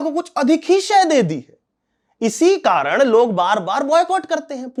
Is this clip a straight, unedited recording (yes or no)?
yes